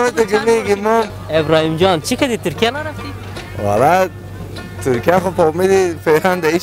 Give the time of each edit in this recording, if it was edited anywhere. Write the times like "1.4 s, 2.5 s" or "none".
1.2 s